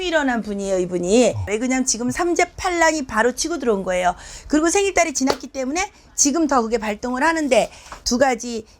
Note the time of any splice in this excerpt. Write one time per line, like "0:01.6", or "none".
none